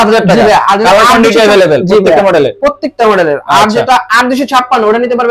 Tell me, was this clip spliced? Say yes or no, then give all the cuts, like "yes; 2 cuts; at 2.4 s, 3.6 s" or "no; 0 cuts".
no; 0 cuts